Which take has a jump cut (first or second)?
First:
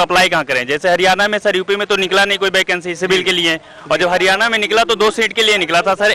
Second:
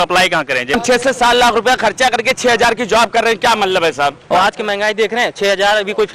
second